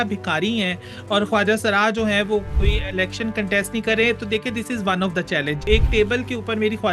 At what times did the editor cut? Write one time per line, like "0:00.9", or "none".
0:02.5
0:05.6